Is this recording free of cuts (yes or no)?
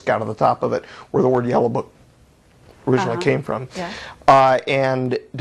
yes